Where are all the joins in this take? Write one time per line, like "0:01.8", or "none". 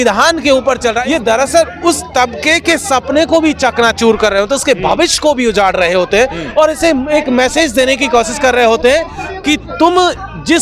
0:01.0